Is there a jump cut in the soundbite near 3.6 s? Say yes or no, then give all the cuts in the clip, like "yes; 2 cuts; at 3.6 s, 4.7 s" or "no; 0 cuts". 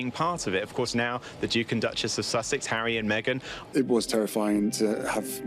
yes; 1 cut; at 3.6 s